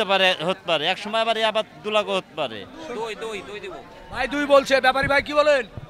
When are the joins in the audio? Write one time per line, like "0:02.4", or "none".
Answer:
0:02.7